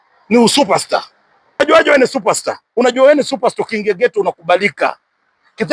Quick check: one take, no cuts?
no; 1 cut; at 1.6 s

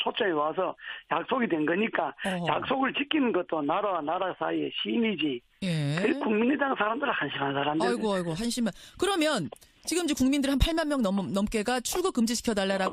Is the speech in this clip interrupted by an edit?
yes; 1 cut; at 1.4 s

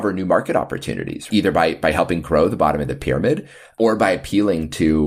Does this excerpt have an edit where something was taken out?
yes; 2 cuts; at 1.3 s, 3.7 s

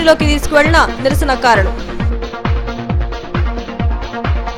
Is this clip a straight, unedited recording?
yes; 0 cuts

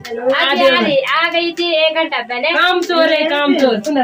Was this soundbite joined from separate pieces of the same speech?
no; 0 cuts

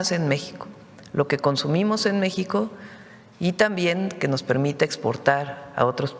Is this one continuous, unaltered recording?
yes; 0 cuts

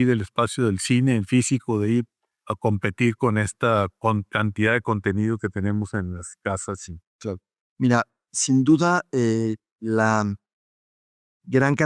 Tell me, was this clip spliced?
no; 0 cuts

